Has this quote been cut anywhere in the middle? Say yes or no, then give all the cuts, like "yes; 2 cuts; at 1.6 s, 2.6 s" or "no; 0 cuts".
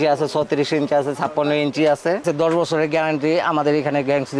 yes; 1 cut; at 2.2 s